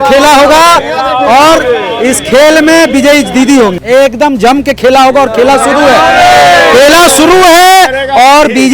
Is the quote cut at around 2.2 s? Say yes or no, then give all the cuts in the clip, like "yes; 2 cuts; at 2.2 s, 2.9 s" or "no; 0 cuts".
no; 1 cut; at 3.8 s